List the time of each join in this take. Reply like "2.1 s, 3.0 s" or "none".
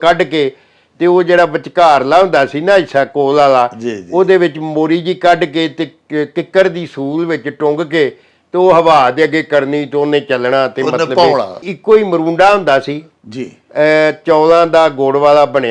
11.6 s

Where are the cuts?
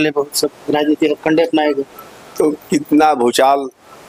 none

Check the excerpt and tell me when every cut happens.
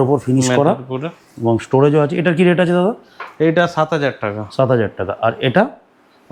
none

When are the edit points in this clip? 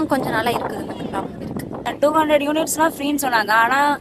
2.1 s

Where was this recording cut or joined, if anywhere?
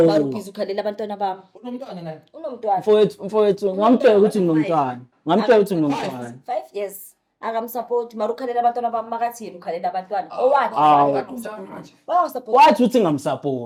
none

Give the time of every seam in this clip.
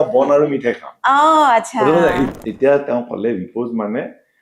2.3 s

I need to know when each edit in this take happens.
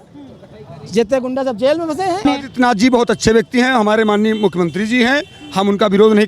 2.2 s

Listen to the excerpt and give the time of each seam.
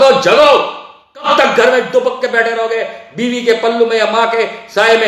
1.3 s

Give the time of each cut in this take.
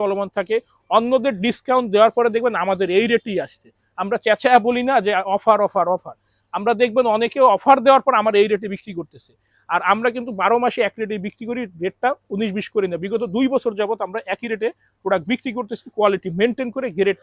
none

